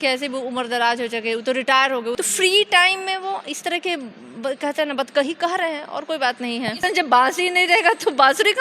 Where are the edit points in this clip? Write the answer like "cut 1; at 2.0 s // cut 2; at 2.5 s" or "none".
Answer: cut 1; at 2.2 s // cut 2; at 6.8 s